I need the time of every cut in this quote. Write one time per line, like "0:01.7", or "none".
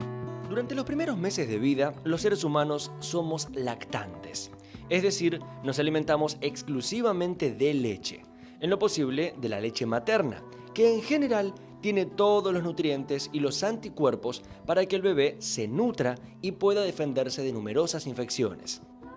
0:04.6